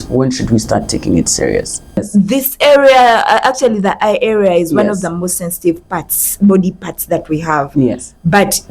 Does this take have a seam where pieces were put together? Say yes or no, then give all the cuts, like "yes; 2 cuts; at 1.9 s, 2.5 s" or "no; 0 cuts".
yes; 1 cut; at 1.9 s